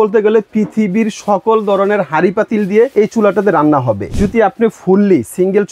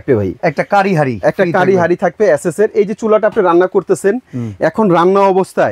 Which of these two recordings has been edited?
first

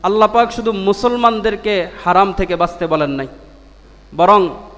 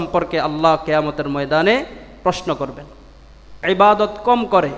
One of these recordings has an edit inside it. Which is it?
second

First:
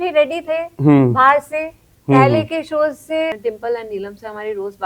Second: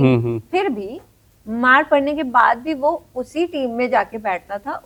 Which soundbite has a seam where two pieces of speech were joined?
first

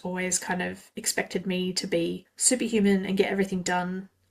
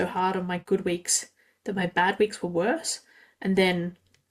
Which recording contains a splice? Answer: first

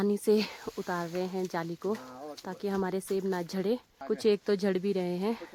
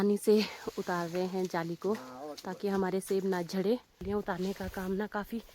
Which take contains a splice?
second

